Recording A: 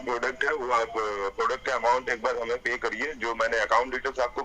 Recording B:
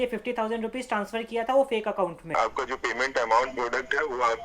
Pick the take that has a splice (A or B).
B